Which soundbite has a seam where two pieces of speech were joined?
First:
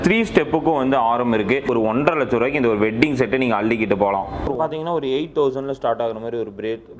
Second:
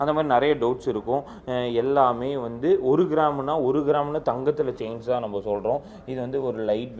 first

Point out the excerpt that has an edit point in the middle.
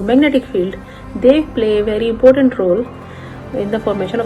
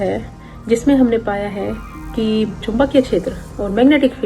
second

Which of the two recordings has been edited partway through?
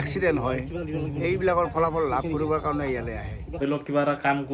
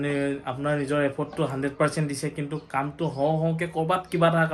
first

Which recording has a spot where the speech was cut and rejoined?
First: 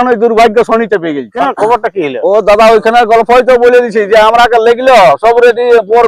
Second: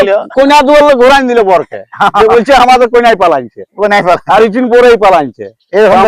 first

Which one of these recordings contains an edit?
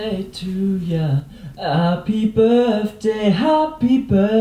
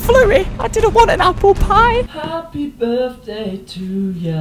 second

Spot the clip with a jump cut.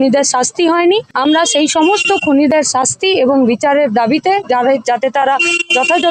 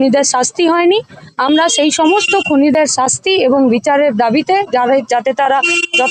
first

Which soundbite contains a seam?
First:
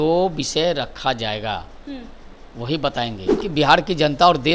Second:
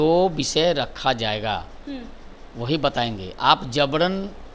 first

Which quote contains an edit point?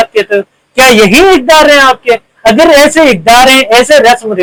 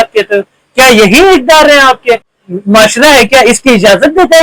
second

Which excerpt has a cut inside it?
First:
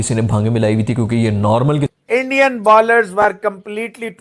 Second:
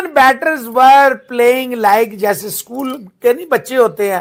first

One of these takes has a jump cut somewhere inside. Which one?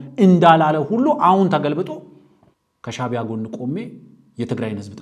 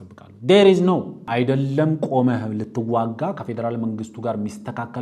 second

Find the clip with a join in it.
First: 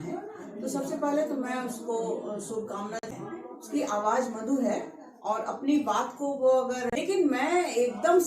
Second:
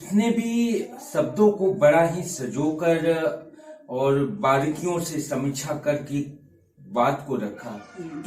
first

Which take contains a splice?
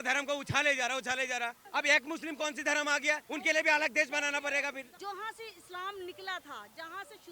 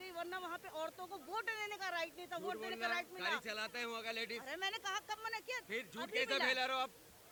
first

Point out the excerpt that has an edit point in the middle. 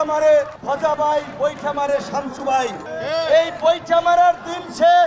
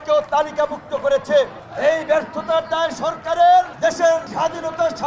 second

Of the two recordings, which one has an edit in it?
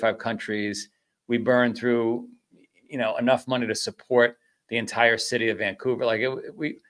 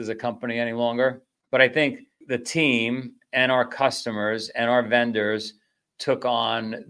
second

